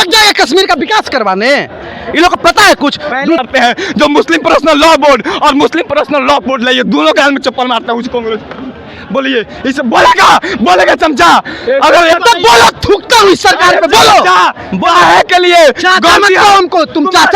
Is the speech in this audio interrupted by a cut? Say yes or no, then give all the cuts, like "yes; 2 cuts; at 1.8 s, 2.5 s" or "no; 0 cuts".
yes; 2 cuts; at 3.4 s, 12.1 s